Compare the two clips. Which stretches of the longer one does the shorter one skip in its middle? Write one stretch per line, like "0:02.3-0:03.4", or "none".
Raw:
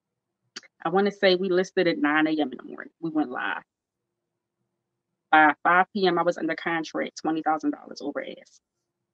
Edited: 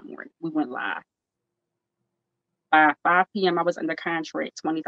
none